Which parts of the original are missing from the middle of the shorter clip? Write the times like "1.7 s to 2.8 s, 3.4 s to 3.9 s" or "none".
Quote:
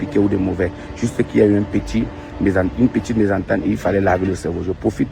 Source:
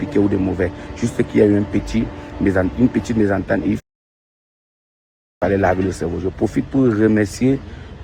3.8 s to 5.4 s